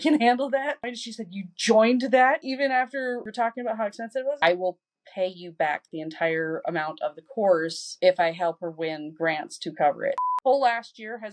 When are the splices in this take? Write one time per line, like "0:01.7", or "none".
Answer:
0:00.8
0:04.4
0:10.2